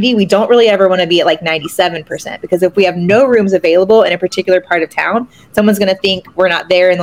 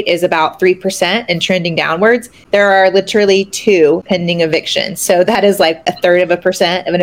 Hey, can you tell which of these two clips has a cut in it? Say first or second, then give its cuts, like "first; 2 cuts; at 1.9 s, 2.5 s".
second; 3 cuts; at 2.3 s, 4.0 s, 5.8 s